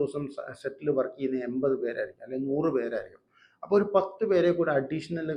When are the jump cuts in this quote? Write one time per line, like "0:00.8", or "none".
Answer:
none